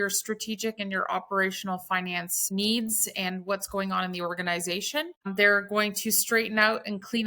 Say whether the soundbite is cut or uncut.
cut